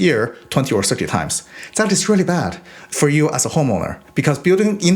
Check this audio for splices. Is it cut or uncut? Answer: uncut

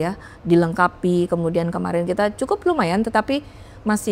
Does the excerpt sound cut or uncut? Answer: uncut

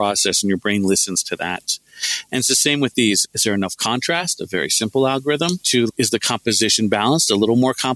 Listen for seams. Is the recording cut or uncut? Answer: cut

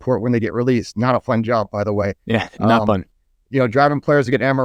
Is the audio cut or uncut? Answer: uncut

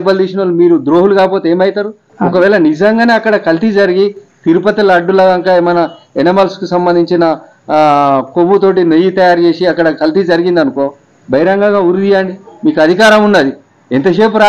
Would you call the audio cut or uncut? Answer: uncut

